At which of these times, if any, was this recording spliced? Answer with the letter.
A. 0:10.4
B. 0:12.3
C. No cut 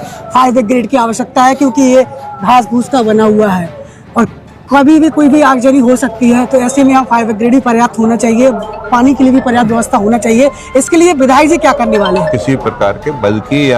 B